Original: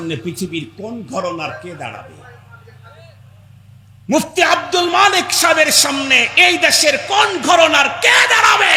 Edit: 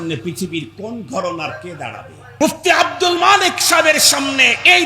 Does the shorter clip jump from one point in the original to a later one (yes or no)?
yes